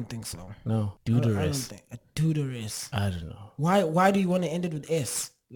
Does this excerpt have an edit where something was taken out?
yes; 1 cut; at 1.0 s

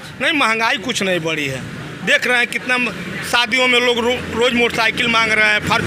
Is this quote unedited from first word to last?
yes; 0 cuts

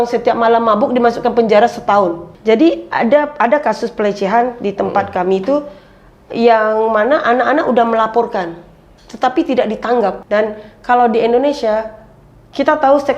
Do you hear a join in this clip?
yes; 2 cuts; at 2.3 s, 10.2 s

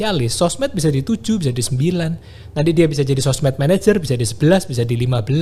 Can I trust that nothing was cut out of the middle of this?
yes; 0 cuts

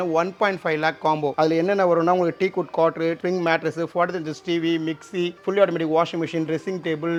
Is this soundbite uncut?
yes; 0 cuts

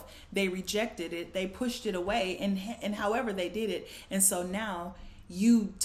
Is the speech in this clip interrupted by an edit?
no; 0 cuts

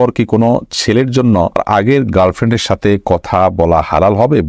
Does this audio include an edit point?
yes; 1 cut; at 1.6 s

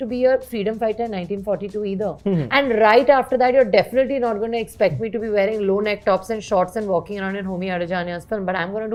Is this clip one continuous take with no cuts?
yes; 0 cuts

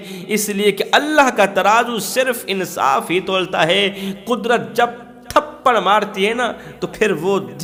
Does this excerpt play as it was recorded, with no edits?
yes; 0 cuts

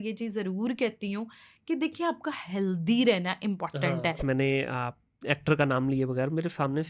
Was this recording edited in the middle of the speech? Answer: yes; 1 cut; at 4.2 s

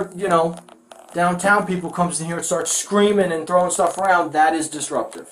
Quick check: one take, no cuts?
yes; 0 cuts

